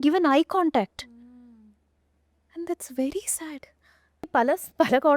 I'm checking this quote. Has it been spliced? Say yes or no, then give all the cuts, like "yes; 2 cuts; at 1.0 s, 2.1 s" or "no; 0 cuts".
yes; 1 cut; at 4.2 s